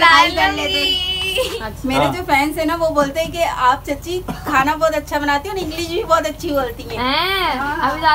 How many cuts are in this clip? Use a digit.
1